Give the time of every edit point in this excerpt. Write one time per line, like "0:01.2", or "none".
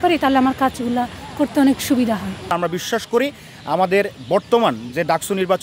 none